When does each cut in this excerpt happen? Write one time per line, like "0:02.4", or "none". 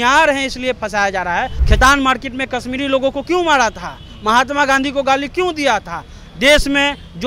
0:01.6